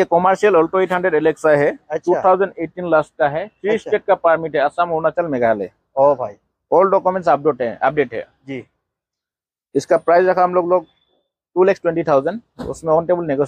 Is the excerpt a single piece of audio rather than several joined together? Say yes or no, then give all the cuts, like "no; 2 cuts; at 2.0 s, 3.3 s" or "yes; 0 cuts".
yes; 0 cuts